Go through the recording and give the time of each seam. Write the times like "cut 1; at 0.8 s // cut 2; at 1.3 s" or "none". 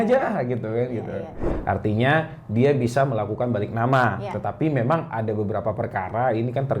cut 1; at 1.5 s